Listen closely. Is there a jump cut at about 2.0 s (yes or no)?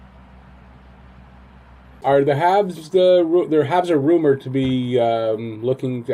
yes